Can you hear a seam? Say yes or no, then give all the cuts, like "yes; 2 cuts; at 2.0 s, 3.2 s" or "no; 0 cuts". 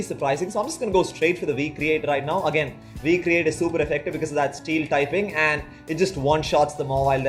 no; 0 cuts